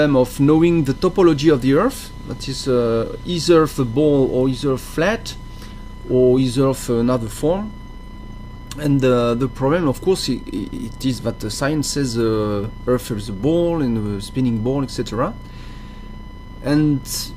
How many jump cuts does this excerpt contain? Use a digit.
1